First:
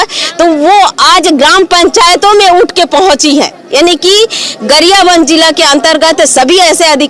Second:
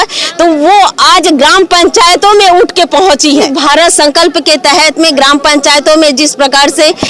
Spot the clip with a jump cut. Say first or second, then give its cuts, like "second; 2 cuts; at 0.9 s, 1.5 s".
second; 1 cut; at 3.5 s